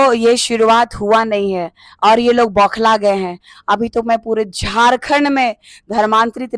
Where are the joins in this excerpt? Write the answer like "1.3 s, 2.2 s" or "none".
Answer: none